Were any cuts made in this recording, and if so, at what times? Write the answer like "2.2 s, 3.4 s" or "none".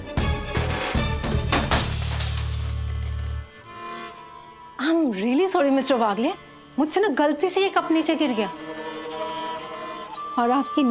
none